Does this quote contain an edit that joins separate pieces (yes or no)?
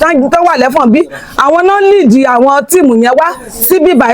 no